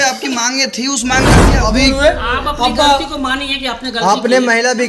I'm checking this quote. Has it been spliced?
yes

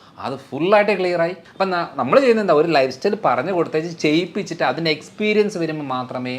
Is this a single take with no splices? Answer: no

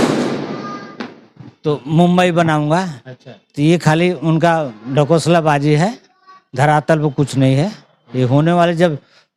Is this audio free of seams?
yes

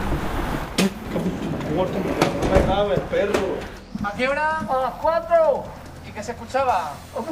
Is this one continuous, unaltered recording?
no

